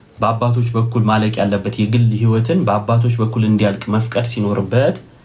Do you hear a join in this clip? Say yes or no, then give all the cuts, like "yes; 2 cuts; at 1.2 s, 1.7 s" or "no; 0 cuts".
no; 0 cuts